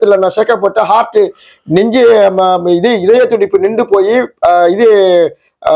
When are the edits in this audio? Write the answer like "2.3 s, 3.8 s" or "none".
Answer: none